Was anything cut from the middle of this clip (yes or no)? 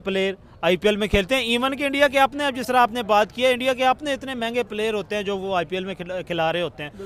no